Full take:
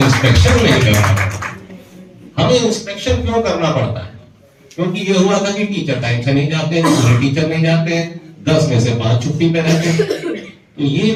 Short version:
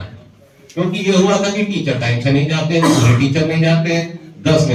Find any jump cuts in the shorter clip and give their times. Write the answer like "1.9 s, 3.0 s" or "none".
none